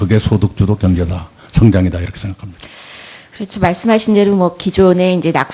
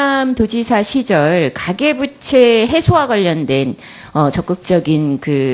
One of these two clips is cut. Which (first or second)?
first